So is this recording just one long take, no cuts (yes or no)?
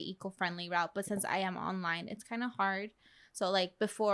yes